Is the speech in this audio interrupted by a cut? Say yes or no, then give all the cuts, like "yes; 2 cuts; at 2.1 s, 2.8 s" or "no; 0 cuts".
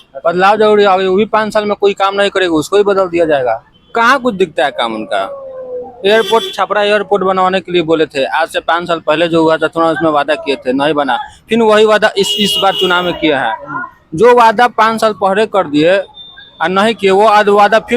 yes; 1 cut; at 3.7 s